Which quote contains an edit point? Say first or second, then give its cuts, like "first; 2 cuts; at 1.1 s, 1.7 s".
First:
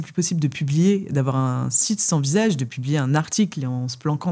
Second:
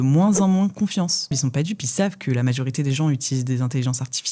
second; 1 cut; at 1.3 s